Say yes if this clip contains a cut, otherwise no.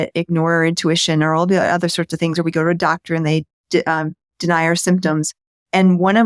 no